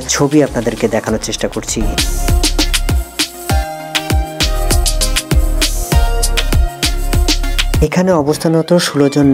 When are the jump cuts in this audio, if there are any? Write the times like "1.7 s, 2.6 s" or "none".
none